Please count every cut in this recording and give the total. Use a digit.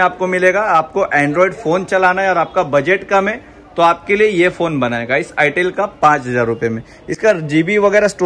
0